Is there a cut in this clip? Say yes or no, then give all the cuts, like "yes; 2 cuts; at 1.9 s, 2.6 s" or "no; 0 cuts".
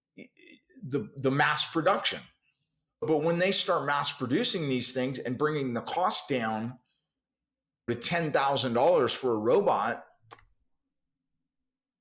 yes; 2 cuts; at 3.0 s, 7.9 s